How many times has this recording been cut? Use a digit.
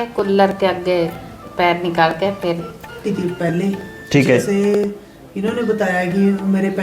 1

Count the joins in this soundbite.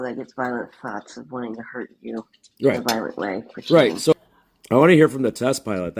1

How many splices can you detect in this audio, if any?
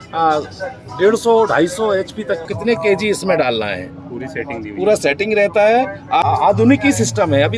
2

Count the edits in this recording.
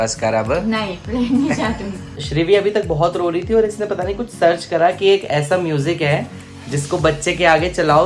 1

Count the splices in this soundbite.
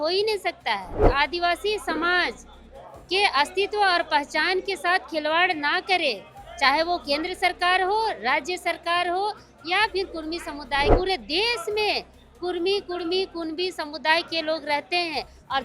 2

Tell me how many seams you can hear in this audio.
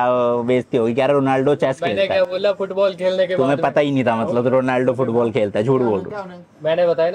0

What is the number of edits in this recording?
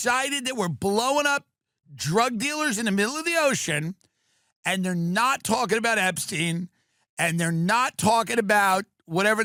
0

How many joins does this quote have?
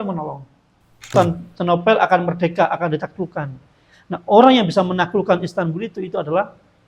1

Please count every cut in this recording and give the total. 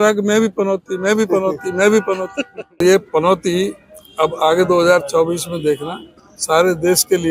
1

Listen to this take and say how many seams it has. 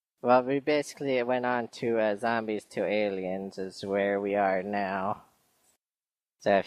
1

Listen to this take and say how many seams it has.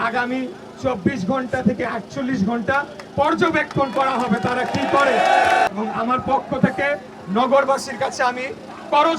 1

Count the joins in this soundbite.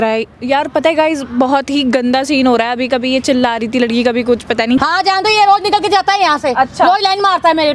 1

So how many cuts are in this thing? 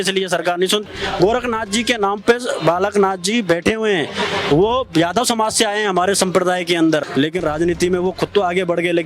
2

